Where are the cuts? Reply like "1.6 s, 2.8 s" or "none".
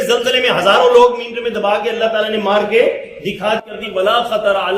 3.7 s